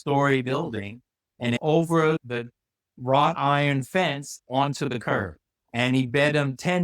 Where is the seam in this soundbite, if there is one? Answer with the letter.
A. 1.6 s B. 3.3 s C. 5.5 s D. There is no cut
A